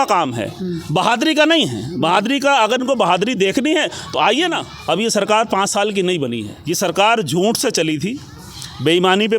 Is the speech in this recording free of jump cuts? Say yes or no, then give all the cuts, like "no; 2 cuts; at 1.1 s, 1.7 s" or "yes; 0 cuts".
no; 2 cuts; at 4.7 s, 6.5 s